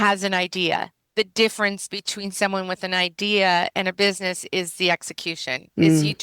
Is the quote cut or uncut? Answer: cut